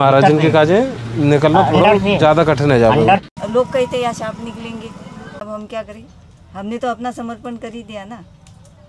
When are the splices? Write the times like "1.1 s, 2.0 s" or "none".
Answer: 3.2 s, 5.4 s